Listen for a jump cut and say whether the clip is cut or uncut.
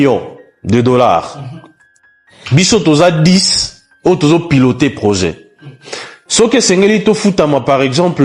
uncut